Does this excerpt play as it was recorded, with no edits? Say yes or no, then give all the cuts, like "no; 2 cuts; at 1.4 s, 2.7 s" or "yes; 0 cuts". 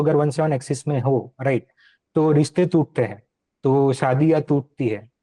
yes; 0 cuts